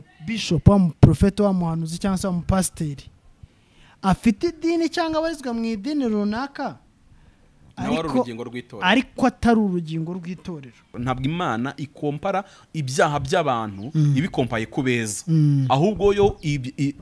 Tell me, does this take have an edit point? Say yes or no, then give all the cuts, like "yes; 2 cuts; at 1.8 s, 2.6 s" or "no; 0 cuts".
yes; 1 cut; at 11.0 s